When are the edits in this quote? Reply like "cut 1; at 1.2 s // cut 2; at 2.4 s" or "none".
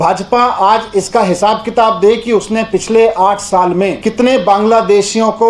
cut 1; at 4.0 s